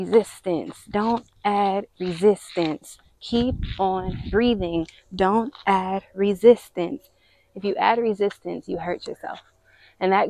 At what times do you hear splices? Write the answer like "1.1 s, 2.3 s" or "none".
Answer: none